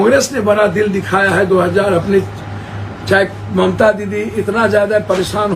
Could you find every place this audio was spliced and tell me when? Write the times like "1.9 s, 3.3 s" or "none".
none